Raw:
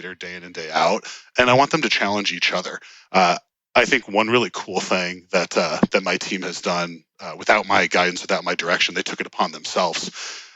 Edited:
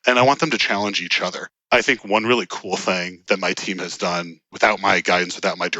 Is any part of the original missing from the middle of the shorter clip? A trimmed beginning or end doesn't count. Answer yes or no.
yes